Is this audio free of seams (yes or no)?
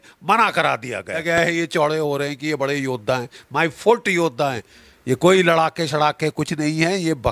no